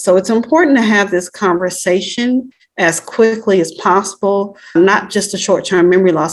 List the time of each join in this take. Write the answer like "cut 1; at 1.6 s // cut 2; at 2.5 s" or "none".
cut 1; at 2.6 s // cut 2; at 4.7 s